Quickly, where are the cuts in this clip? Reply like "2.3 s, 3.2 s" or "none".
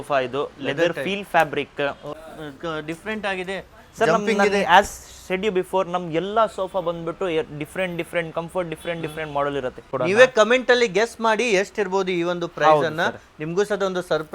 2.1 s, 9.9 s